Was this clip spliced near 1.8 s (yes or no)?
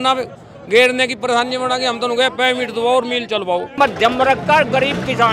no